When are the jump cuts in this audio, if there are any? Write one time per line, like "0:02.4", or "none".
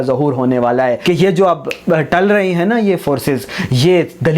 0:01.0